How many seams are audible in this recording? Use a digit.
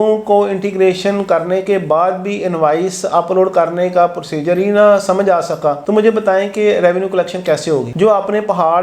0